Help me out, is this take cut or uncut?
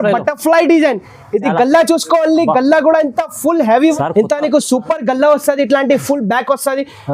cut